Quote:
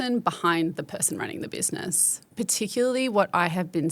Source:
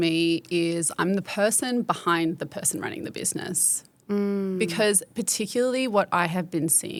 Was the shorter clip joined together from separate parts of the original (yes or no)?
yes